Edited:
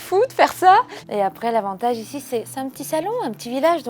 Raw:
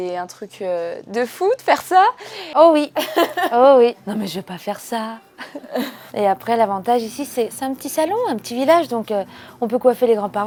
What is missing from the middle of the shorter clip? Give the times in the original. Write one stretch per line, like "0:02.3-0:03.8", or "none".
0:02.3-0:06.0